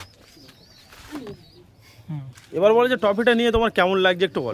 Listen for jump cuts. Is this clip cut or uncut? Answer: uncut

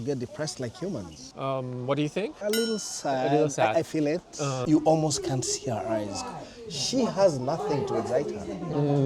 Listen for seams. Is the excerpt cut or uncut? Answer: cut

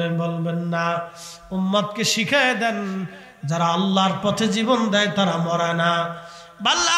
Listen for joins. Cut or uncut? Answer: uncut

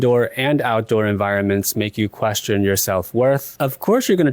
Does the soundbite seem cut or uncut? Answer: uncut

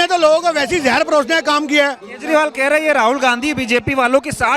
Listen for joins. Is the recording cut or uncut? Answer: uncut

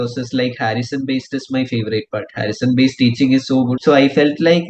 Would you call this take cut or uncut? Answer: cut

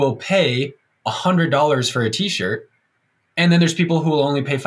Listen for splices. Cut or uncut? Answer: uncut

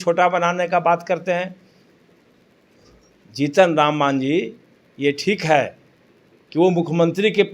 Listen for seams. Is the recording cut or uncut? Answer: uncut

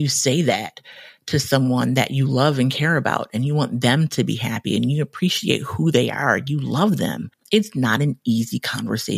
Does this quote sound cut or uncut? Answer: cut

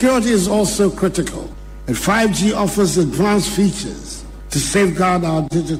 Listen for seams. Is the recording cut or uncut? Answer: uncut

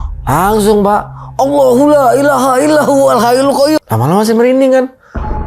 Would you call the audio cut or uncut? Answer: cut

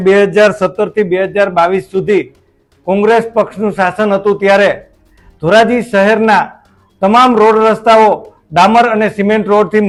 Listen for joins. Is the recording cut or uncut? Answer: uncut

